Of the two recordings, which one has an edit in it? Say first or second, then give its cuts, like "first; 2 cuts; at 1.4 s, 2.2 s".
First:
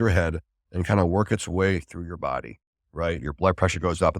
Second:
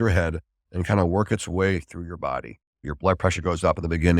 second; 1 cut; at 2.9 s